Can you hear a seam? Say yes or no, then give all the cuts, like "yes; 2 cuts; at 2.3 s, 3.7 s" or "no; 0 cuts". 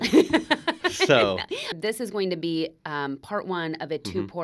yes; 1 cut; at 1.7 s